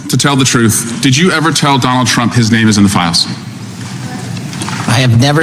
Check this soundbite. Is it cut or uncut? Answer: uncut